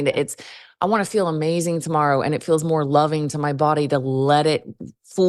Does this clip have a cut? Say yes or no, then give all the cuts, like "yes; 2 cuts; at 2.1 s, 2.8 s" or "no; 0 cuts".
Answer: no; 0 cuts